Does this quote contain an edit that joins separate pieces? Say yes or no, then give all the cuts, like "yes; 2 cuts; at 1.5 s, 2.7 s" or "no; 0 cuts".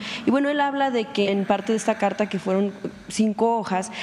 yes; 1 cut; at 1.3 s